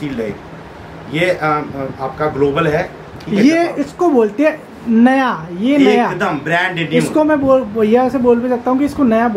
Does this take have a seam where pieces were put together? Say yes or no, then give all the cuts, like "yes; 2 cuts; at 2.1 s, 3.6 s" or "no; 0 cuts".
no; 0 cuts